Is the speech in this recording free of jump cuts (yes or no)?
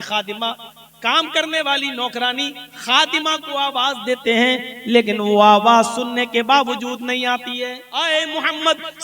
no